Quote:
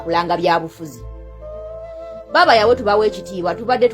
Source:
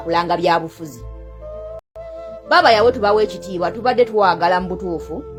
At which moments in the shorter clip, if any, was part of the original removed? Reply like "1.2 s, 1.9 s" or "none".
1.8 s